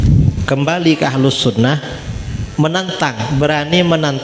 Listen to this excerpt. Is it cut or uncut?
uncut